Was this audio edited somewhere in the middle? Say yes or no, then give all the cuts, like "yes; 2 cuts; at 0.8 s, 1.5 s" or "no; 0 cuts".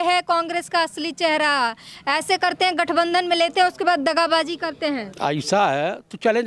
no; 0 cuts